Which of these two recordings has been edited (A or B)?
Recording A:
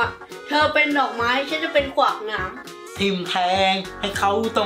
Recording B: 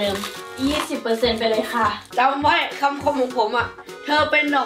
B